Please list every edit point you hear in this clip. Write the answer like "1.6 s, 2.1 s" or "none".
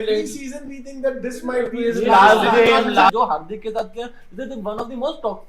3.1 s